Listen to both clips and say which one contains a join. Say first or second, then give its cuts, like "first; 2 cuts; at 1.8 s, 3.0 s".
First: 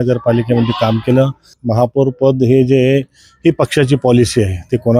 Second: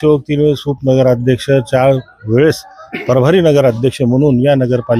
first; 1 cut; at 1.5 s